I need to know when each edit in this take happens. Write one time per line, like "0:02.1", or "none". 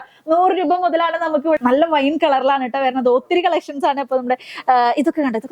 0:01.6